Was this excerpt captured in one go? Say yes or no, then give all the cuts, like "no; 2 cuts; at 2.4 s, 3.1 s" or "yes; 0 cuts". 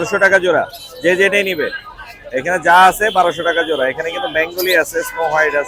yes; 0 cuts